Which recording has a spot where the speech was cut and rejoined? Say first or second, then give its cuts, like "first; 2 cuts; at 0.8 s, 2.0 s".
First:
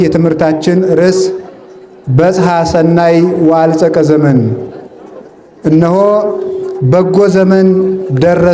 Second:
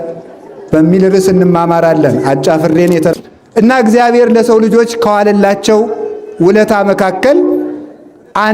second; 1 cut; at 3.1 s